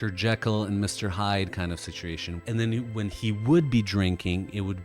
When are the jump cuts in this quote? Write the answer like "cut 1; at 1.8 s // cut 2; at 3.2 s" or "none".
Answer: cut 1; at 2.3 s